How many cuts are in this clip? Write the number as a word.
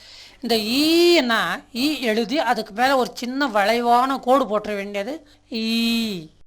one